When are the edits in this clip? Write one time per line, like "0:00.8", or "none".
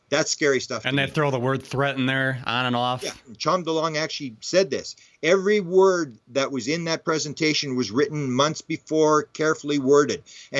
0:03.3

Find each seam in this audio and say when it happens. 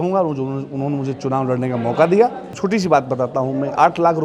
0:02.5

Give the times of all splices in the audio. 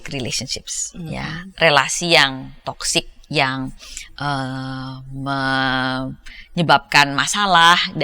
none

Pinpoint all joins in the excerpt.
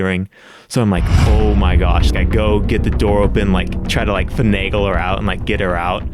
none

